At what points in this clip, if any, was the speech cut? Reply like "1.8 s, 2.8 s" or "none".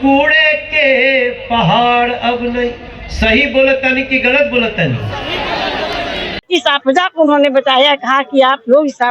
6.4 s